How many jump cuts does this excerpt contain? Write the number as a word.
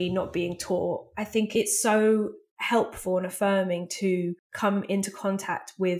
two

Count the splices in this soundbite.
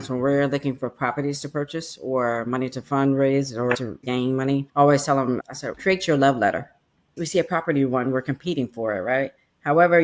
two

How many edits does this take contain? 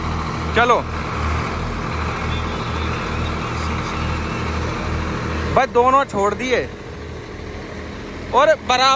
zero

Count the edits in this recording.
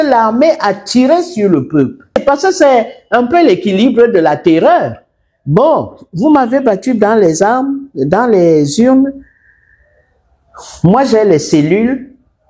one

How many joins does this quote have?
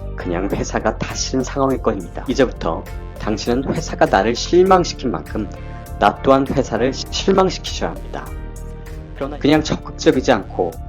two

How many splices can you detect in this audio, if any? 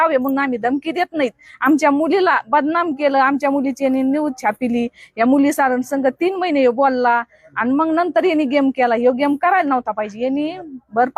zero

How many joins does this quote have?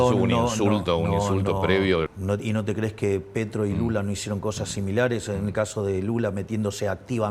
one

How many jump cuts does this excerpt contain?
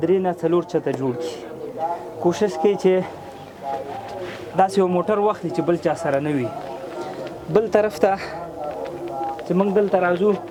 zero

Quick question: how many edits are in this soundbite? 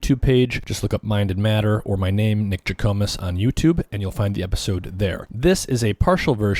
zero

